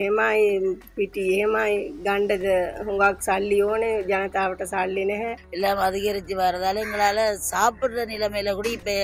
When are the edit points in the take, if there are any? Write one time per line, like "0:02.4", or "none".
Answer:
0:05.4